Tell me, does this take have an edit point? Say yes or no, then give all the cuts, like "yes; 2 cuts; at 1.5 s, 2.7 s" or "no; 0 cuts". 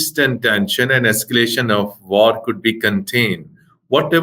no; 0 cuts